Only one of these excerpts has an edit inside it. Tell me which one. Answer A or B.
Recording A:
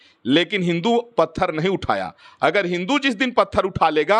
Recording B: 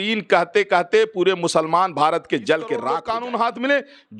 B